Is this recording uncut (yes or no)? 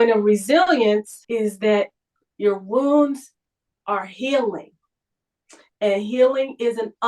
no